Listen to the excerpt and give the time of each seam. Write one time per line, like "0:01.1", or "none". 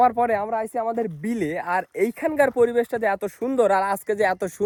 none